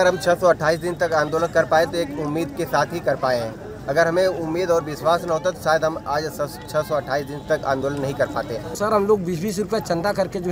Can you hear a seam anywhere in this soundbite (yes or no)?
yes